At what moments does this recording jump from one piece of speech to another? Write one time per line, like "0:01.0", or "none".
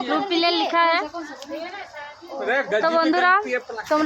none